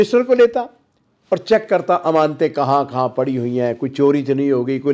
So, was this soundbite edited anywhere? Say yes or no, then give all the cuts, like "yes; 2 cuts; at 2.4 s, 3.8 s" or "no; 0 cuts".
no; 0 cuts